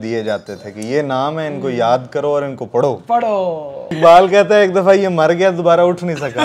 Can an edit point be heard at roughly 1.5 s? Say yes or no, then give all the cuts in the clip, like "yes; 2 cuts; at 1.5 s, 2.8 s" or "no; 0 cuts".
no; 1 cut; at 4.0 s